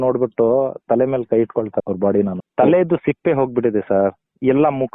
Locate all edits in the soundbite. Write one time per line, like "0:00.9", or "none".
0:02.4